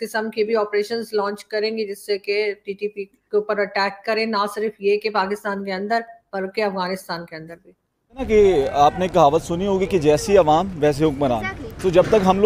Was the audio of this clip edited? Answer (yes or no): yes